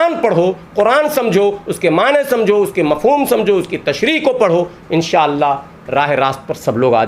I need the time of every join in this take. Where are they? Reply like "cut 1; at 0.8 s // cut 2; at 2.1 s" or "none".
none